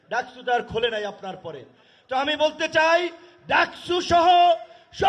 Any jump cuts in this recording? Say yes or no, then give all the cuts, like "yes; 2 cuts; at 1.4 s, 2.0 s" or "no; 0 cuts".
no; 0 cuts